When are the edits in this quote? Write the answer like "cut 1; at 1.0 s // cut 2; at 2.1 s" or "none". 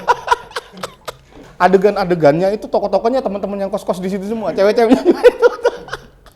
cut 1; at 1.4 s